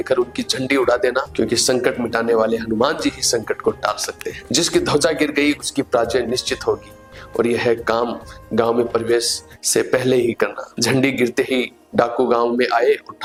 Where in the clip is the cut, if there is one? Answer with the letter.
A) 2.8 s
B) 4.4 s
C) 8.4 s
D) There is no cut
D